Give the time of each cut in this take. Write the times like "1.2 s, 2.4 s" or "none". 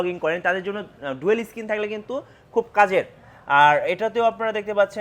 none